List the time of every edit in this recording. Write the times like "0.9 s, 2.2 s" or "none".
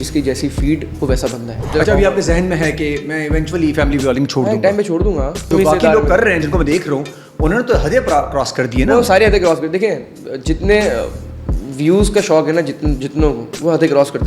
1.6 s, 5.5 s